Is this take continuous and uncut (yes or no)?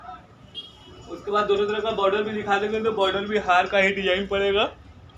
yes